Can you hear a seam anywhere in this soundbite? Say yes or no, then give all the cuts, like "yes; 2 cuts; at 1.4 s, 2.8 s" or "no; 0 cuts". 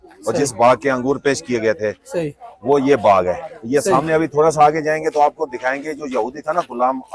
no; 0 cuts